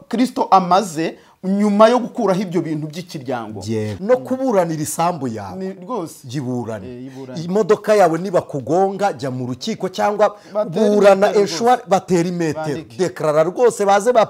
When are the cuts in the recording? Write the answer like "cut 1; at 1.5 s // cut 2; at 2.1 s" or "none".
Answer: cut 1; at 3.9 s